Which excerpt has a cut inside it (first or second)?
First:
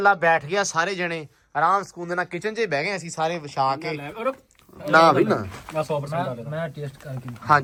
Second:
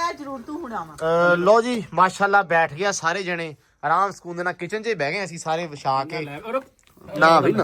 second